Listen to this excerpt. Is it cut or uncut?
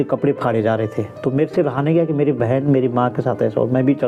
uncut